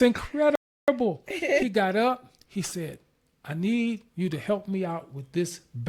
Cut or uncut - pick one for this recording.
uncut